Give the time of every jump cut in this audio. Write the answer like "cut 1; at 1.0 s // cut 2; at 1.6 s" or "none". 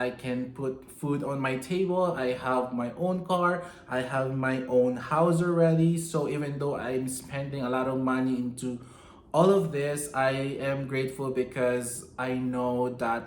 none

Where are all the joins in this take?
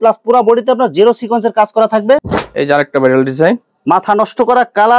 cut 1; at 2.2 s

